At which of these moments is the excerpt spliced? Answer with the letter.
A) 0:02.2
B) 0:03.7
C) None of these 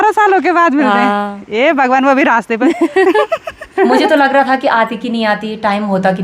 B